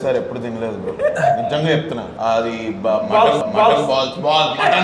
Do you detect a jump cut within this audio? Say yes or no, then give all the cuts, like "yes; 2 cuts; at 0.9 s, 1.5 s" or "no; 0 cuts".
yes; 1 cut; at 2.1 s